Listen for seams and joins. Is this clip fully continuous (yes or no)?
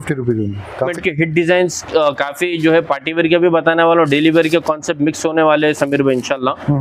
no